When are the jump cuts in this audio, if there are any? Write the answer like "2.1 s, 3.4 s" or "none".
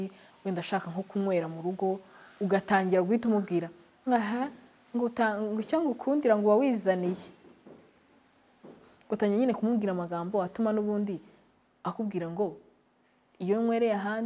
none

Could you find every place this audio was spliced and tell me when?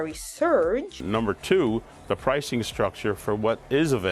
0.9 s

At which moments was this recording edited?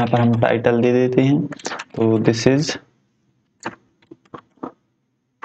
none

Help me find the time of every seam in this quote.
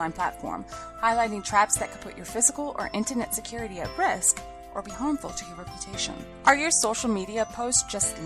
none

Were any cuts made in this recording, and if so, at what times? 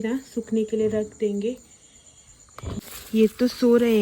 2.8 s

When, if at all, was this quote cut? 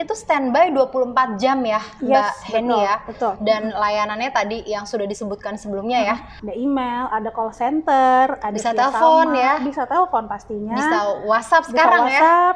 6.4 s

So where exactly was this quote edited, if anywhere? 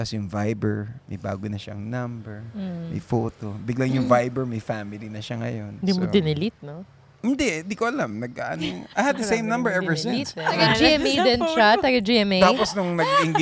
5.8 s, 10.6 s

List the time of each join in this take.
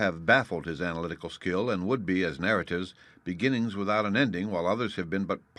4.1 s

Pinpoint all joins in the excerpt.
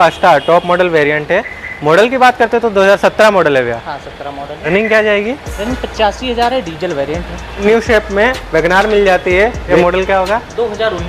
4.6 s, 7.6 s, 9.7 s

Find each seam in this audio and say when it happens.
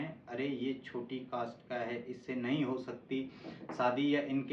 none

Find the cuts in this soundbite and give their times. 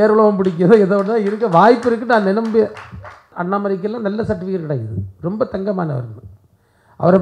3.3 s

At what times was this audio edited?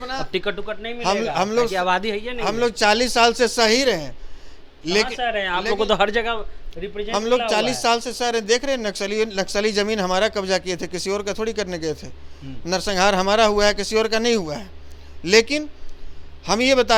none

